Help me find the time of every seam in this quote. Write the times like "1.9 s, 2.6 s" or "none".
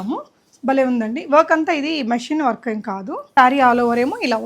3.3 s